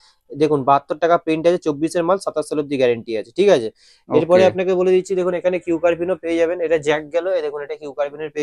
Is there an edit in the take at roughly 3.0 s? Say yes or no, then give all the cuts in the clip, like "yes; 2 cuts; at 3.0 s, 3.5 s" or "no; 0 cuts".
no; 0 cuts